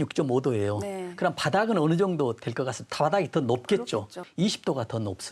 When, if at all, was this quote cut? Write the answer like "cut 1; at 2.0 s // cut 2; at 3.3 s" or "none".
cut 1; at 4.2 s